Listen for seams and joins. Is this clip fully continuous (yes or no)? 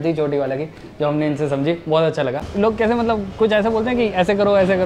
no